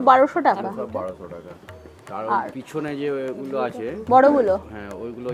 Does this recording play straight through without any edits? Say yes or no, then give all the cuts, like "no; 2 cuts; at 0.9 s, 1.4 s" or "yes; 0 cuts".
yes; 0 cuts